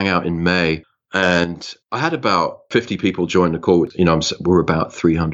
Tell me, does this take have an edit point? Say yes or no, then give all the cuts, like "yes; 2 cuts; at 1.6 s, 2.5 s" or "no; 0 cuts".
yes; 2 cuts; at 2.7 s, 3.9 s